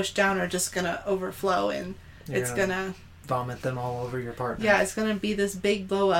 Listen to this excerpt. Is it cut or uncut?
uncut